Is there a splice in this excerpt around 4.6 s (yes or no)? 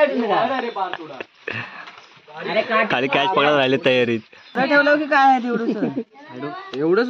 yes